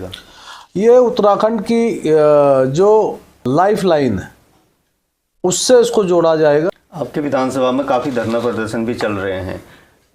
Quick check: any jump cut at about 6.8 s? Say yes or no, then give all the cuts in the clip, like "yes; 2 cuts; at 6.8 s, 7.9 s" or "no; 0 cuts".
yes; 1 cut; at 6.8 s